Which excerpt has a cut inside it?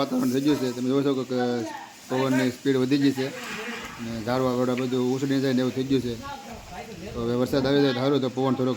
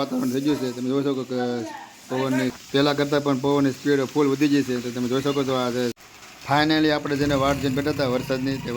second; 2 cuts; at 2.6 s, 6.0 s

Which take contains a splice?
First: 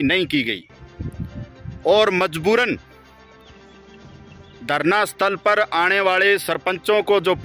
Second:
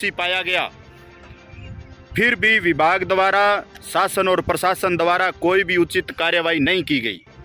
first; 2 cuts; at 3.0 s, 4.3 s

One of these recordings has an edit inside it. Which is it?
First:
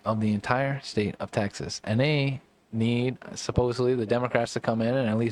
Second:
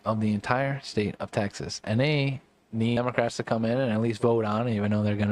second; 1 cut; at 3.0 s

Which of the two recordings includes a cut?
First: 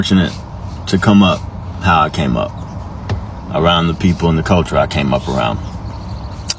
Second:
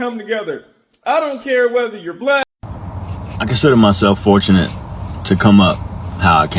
second; 1 cut; at 2.4 s

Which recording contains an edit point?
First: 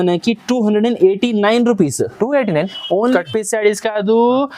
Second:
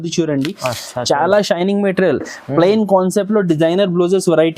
first; 1 cut; at 3.1 s

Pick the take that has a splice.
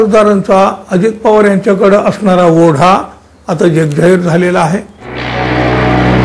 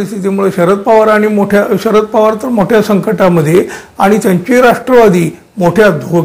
first; 1 cut; at 5.3 s

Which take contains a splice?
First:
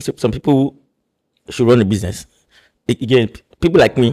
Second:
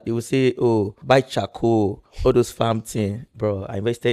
second; 1 cut; at 1.0 s

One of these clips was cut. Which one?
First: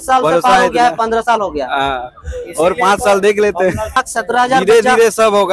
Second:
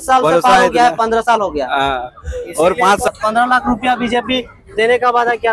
second; 1 cut; at 3.1 s

